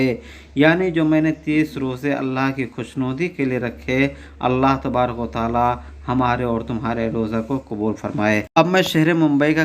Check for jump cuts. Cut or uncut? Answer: cut